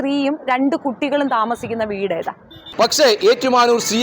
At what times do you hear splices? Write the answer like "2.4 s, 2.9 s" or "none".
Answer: 2.7 s

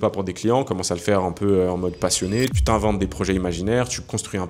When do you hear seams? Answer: 2.6 s

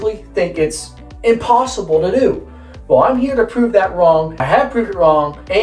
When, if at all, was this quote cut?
none

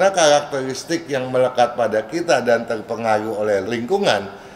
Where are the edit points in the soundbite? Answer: none

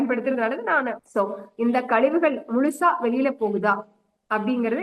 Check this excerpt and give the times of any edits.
1.0 s

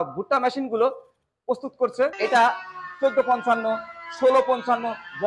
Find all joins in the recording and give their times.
2.1 s

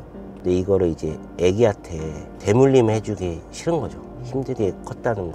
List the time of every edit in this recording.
none

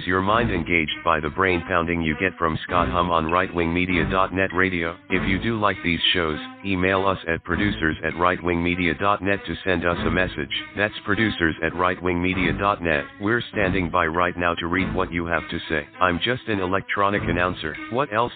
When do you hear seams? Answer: none

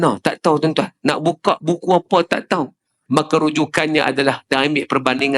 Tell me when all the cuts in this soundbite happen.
2.9 s

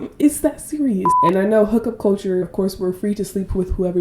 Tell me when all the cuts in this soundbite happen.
1.1 s, 2.4 s

